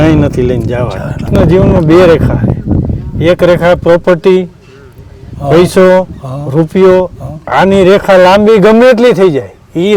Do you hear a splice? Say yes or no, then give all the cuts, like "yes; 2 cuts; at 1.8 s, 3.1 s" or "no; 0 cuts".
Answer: yes; 1 cut; at 1.3 s